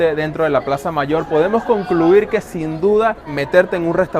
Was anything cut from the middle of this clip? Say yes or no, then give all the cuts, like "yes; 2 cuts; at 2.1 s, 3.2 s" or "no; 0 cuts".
yes; 1 cut; at 3.3 s